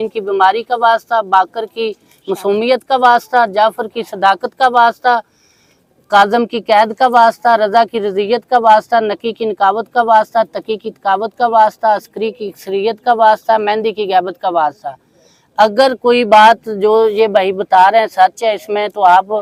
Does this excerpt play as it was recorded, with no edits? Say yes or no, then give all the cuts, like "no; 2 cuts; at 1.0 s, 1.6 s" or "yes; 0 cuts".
yes; 0 cuts